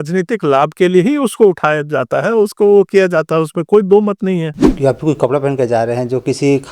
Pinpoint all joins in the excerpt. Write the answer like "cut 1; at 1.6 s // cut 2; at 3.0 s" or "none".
cut 1; at 4.6 s